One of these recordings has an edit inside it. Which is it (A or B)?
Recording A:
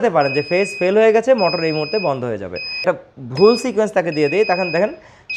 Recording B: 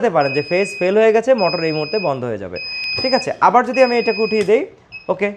A